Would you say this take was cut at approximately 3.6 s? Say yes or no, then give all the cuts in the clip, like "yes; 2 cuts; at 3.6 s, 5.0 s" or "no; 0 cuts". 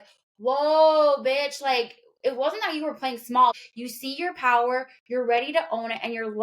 yes; 1 cut; at 3.6 s